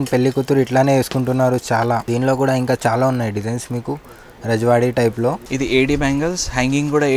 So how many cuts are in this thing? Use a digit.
2